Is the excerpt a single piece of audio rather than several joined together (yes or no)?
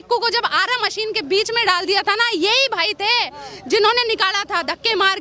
yes